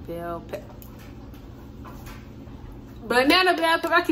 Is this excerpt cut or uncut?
uncut